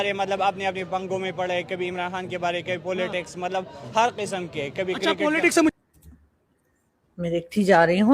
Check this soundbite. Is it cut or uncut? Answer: cut